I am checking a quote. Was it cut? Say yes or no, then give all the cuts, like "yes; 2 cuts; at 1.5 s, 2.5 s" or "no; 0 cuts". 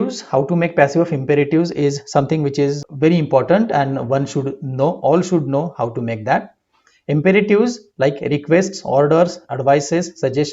yes; 1 cut; at 2.8 s